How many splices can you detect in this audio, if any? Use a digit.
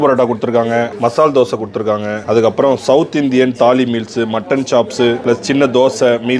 3